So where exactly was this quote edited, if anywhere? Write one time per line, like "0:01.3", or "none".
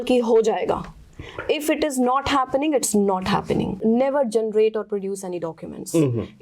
0:03.8

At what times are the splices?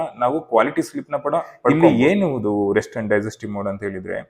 0:01.7

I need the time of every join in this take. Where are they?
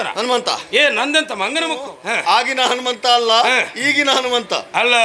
0:01.9

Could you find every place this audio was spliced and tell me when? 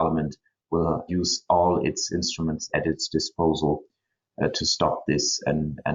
0:01.1
0:02.7

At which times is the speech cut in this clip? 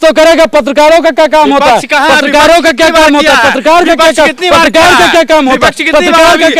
none

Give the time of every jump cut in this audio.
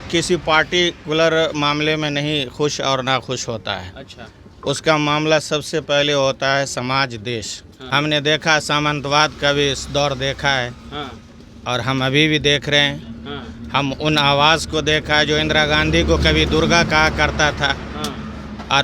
0:07.8

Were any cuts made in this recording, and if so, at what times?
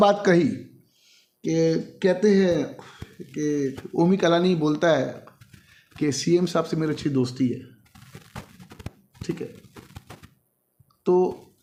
none

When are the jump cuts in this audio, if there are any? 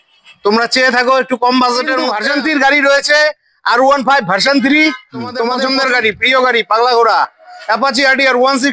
0:02.1
0:05.5

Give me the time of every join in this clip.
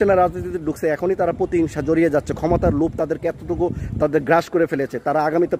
none

